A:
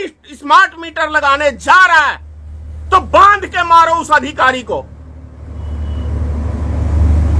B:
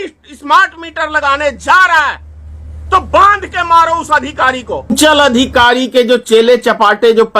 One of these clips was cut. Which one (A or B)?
B